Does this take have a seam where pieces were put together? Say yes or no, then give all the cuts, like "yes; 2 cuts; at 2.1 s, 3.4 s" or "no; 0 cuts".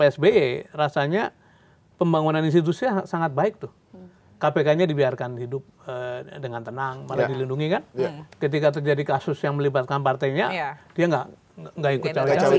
no; 0 cuts